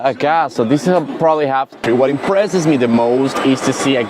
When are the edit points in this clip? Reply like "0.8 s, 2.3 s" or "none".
1.8 s